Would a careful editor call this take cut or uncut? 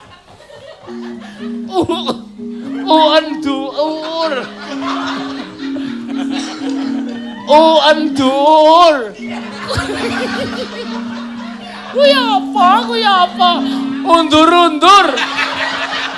cut